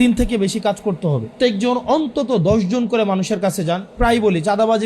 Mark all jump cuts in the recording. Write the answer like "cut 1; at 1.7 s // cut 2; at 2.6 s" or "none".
cut 1; at 1.3 s // cut 2; at 4.0 s